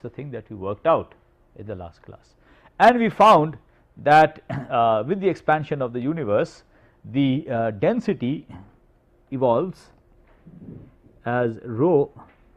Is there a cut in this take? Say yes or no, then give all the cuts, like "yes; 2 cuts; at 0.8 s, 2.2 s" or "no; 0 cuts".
no; 0 cuts